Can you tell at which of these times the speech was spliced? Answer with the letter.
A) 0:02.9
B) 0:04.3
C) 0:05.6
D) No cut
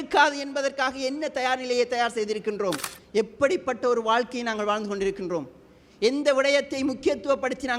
A